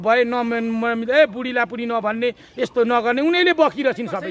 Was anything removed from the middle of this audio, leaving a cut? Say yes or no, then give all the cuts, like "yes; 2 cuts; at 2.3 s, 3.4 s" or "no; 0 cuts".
no; 0 cuts